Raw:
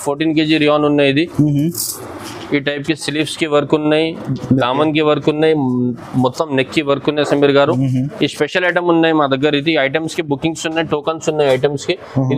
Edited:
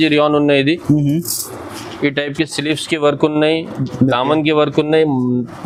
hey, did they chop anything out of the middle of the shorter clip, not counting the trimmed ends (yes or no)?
no